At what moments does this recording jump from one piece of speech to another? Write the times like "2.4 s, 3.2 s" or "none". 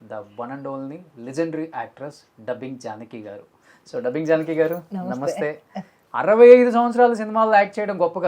6.0 s